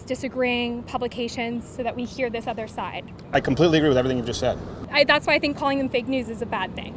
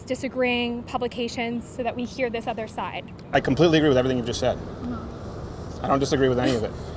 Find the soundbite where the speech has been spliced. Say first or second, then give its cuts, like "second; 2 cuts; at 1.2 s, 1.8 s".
first; 1 cut; at 4.7 s